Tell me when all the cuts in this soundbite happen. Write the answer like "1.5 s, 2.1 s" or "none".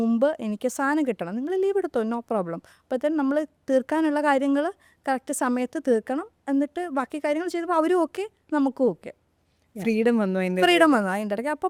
none